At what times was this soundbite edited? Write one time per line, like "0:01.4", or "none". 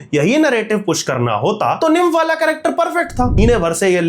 0:01.8
0:03.4